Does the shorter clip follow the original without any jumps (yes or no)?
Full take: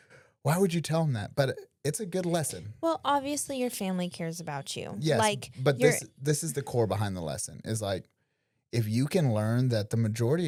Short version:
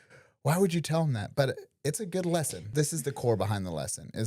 no